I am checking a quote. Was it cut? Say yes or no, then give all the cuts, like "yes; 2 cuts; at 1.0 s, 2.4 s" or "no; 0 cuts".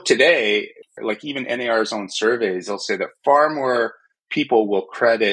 yes; 1 cut; at 1.0 s